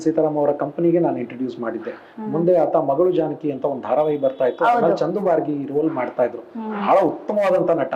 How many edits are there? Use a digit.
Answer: 0